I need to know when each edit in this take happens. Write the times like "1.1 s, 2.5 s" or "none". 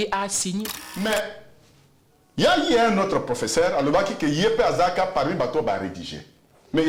1.0 s